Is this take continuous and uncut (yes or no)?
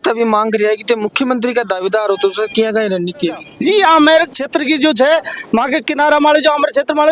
no